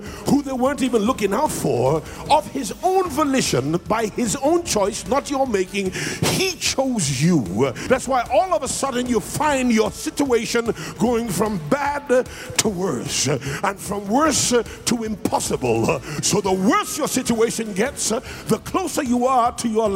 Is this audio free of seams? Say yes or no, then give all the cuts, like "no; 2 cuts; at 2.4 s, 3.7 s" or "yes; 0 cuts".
no; 2 cuts; at 7.8 s, 16.1 s